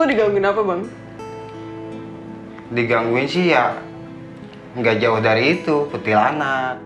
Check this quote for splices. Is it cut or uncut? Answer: uncut